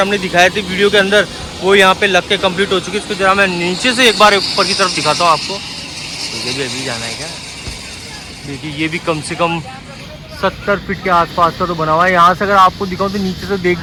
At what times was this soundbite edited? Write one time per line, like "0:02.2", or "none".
none